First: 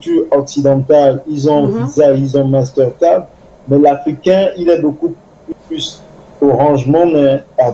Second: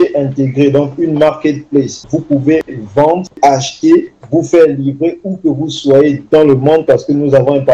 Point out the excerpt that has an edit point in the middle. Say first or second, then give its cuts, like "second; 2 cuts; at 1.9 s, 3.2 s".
second; 3 cuts; at 2.1 s, 3.4 s, 4.2 s